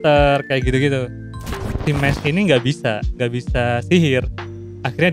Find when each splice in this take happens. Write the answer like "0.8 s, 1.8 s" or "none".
1.8 s